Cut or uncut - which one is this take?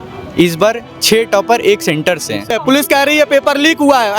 cut